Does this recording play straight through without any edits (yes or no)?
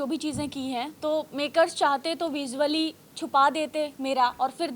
yes